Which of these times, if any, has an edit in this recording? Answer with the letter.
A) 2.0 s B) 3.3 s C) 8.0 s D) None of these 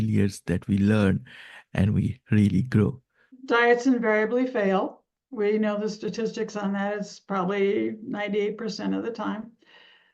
B